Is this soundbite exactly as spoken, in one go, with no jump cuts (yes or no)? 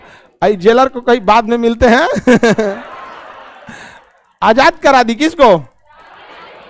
yes